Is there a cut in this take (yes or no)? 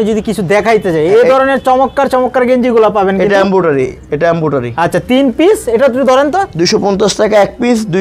no